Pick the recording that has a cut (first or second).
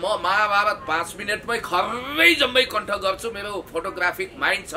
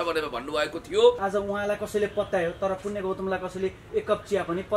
second